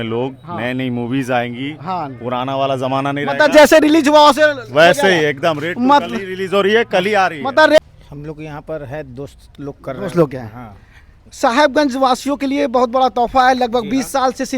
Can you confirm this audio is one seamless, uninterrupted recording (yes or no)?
no